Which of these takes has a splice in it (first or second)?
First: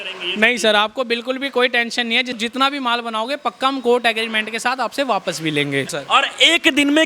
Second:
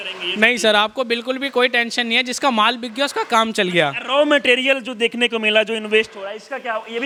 first